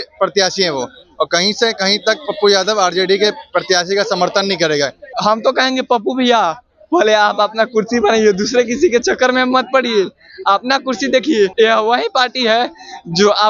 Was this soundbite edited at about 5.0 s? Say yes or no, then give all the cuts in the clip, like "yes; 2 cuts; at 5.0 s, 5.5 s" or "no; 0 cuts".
yes; 2 cuts; at 5.0 s, 11.5 s